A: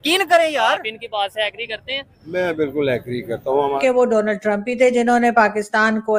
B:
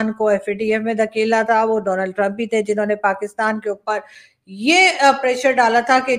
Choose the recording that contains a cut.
A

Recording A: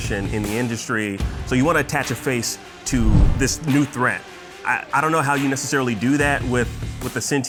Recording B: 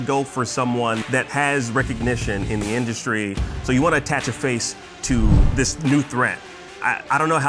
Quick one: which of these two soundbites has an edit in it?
B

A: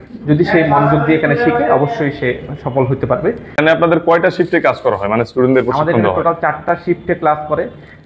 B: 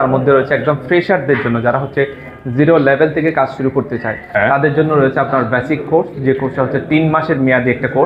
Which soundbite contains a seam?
A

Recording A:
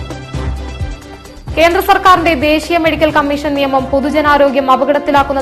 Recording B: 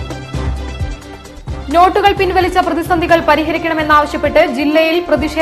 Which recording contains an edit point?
B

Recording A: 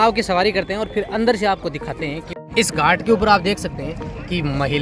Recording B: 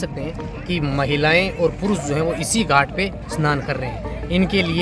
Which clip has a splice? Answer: A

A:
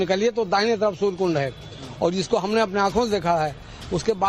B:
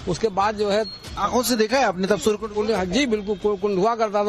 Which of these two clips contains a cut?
A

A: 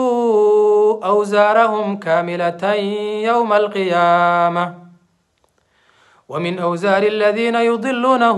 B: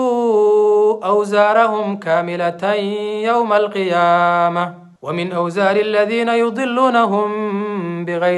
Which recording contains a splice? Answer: B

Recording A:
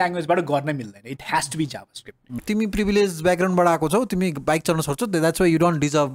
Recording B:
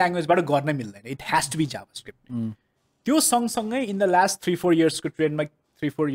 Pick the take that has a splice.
A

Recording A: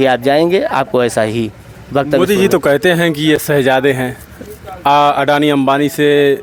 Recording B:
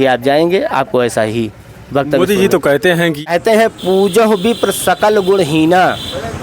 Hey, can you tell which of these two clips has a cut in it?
B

